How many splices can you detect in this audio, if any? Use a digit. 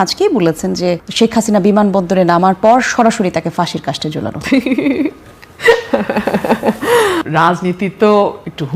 1